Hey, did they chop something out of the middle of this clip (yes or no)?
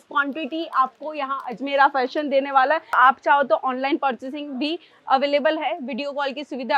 yes